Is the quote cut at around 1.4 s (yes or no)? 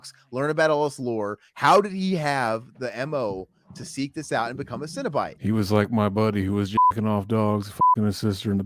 yes